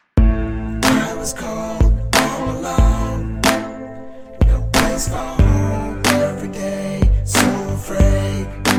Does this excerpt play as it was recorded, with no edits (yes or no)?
yes